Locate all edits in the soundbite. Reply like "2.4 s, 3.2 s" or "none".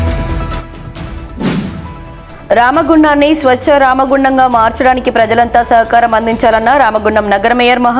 1.8 s